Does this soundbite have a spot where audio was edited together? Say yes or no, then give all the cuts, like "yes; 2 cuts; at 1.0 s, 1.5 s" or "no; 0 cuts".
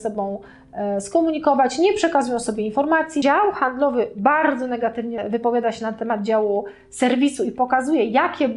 yes; 2 cuts; at 3.2 s, 5.2 s